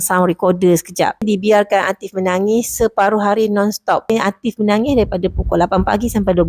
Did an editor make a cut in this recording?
yes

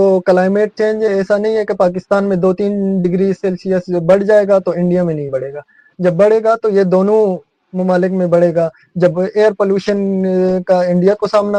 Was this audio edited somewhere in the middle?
no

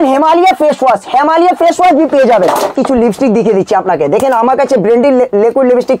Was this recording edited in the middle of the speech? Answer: yes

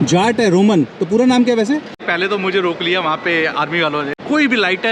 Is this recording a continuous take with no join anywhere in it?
no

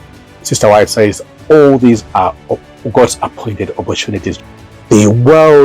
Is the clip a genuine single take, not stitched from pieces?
no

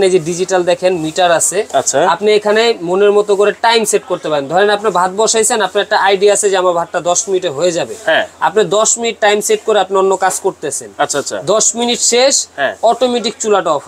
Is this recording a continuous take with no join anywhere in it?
yes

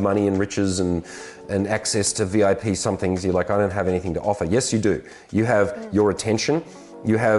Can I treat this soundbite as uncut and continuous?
yes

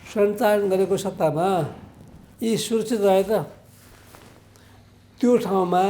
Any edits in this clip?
no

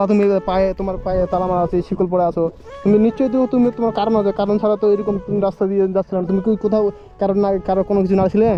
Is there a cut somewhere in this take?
no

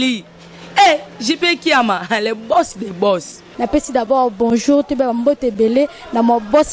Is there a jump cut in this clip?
no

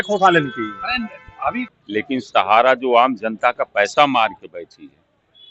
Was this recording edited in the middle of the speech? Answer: yes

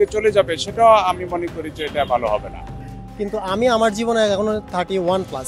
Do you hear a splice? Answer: yes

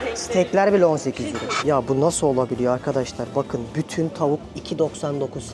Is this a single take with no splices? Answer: no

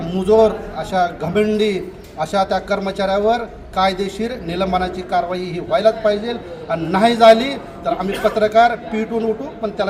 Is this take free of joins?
yes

